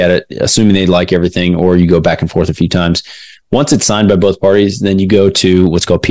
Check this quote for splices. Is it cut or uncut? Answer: uncut